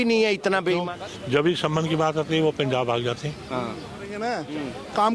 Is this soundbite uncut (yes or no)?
no